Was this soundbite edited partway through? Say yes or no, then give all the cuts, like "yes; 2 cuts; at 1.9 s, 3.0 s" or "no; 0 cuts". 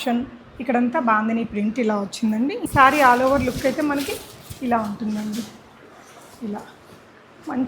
yes; 1 cut; at 2.6 s